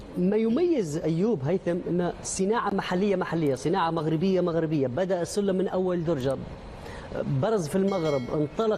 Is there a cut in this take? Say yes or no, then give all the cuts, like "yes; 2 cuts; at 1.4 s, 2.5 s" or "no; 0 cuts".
no; 0 cuts